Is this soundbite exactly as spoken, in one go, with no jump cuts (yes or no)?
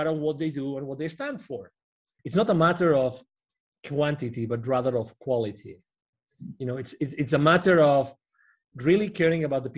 no